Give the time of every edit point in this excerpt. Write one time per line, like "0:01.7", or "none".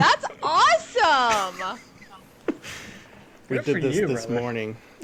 none